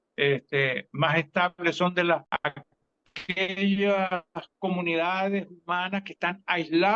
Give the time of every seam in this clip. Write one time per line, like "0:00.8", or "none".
0:02.2